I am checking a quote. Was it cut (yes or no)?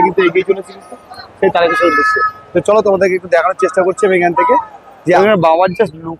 yes